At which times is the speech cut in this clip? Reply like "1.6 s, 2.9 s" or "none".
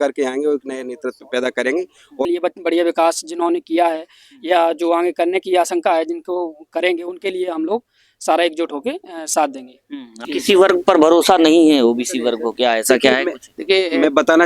2.2 s, 10.2 s